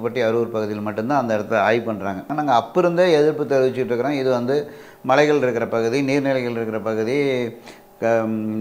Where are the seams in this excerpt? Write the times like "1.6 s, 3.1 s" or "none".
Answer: 2.3 s

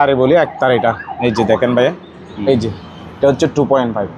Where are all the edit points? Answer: 2.2 s

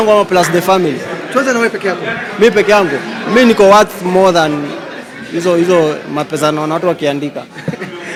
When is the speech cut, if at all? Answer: none

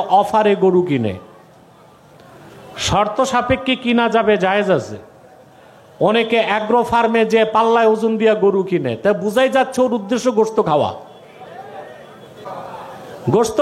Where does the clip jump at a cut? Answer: 12.5 s

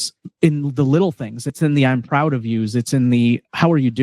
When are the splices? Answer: 1.6 s

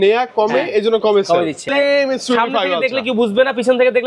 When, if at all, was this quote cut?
1.6 s

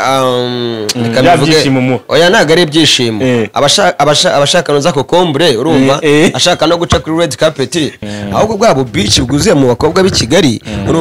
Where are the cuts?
8.0 s

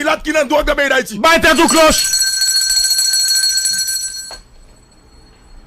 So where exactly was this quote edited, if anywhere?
4.6 s

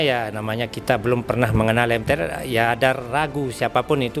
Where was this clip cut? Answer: none

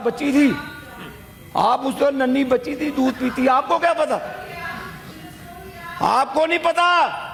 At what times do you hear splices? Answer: none

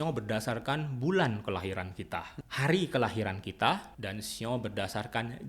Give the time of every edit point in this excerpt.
2.4 s, 4.0 s

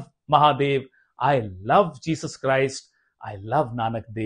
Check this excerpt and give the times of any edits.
none

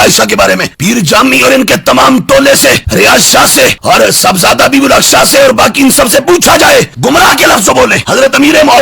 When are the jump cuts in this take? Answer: 6.9 s

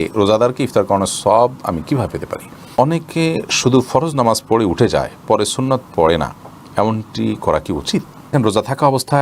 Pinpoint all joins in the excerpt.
2.7 s, 8.3 s

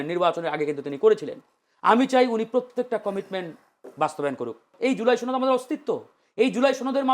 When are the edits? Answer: 4.6 s

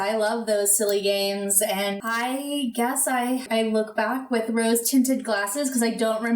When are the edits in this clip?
2.0 s, 3.4 s

